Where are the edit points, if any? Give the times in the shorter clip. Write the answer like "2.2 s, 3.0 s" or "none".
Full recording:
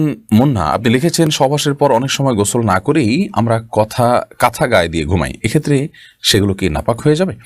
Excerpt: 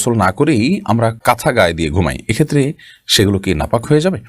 1.2 s